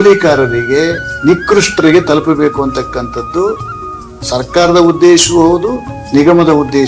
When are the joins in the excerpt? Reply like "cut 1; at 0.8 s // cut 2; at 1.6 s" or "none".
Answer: cut 1; at 1.1 s